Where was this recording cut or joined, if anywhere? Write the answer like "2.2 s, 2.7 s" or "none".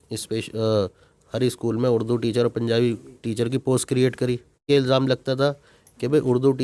4.7 s